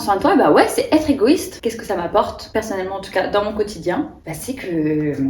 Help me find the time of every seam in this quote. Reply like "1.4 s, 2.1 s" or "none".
1.6 s, 2.4 s